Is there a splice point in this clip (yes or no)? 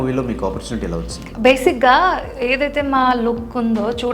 yes